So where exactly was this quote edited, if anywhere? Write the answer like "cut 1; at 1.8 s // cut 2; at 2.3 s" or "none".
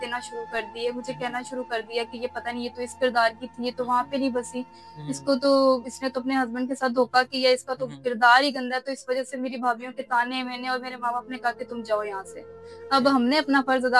none